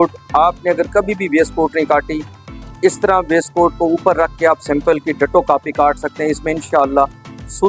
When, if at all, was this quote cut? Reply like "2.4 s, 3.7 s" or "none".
none

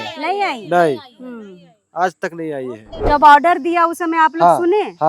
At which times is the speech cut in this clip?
3.0 s

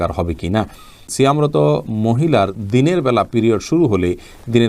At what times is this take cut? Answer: 1.1 s

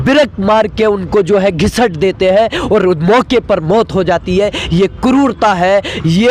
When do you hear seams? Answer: none

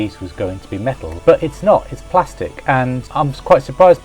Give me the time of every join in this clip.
1.1 s, 3.0 s

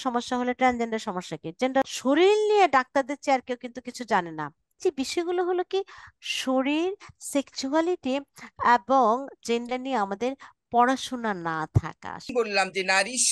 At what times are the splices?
1.8 s, 4.8 s, 12.3 s

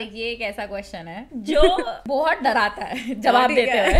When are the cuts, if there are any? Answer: 1.2 s, 2.0 s

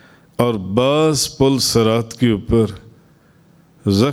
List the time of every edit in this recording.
none

